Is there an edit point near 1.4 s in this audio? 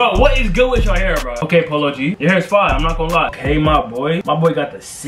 yes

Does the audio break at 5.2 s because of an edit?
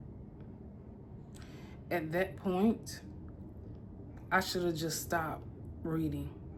no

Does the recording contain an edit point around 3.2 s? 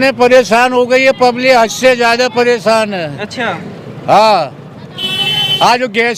no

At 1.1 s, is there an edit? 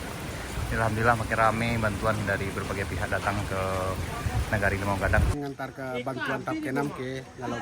no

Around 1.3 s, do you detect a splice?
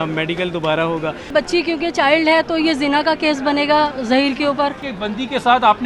yes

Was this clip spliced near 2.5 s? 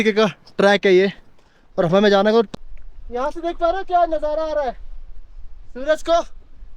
yes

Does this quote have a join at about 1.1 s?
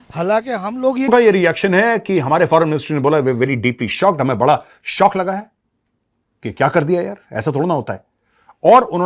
yes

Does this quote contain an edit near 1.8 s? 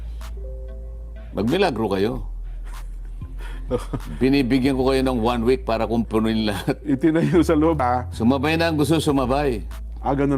no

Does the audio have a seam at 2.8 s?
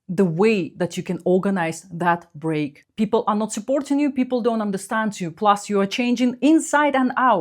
yes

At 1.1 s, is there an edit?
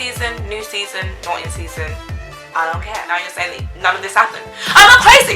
no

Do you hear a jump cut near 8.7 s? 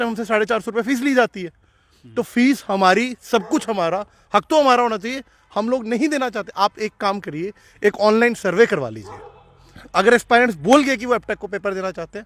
no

